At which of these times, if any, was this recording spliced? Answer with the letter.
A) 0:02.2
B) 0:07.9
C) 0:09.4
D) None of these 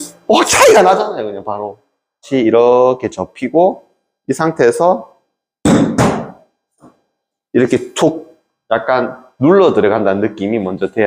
A